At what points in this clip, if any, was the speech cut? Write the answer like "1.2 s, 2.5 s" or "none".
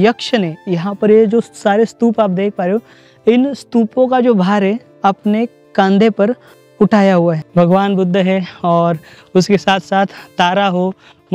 7.4 s